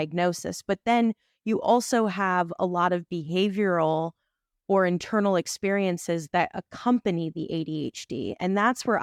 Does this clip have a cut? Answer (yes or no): no